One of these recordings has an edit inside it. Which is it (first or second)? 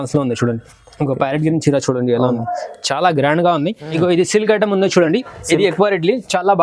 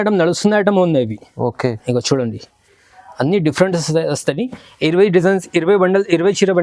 first